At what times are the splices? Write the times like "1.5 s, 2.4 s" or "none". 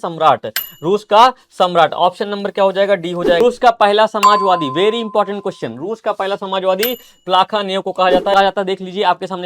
3.4 s, 8.3 s